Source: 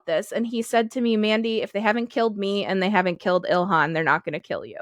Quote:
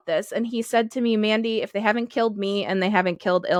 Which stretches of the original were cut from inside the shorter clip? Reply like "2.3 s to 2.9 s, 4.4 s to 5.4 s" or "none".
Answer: none